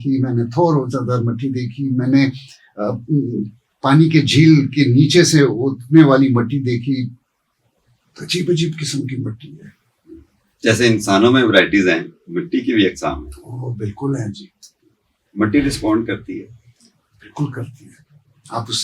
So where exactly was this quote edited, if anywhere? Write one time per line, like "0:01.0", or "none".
none